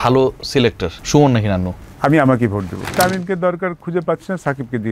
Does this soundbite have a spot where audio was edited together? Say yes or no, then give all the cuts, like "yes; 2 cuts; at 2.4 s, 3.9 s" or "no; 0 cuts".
yes; 3 cuts; at 0.9 s, 1.8 s, 2.9 s